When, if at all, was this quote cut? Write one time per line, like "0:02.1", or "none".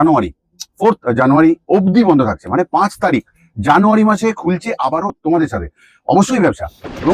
0:05.1